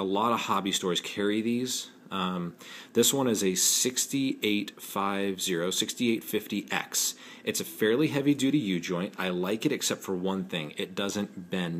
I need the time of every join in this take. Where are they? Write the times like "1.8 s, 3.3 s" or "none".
none